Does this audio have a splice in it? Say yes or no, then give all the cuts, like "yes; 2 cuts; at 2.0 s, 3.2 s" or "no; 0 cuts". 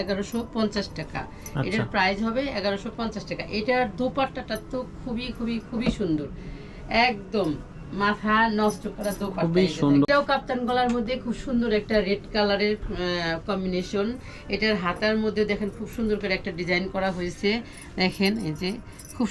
yes; 1 cut; at 10.1 s